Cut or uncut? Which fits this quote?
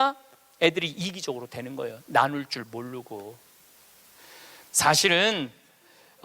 cut